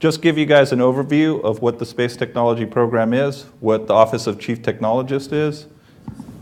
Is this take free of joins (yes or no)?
no